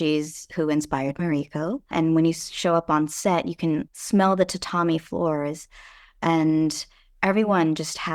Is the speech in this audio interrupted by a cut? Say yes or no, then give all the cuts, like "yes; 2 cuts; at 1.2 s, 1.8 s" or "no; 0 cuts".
yes; 2 cuts; at 1.9 s, 3.9 s